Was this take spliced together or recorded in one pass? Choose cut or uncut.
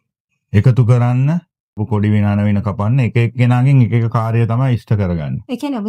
cut